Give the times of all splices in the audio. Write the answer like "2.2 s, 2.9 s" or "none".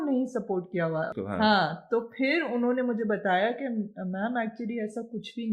1.1 s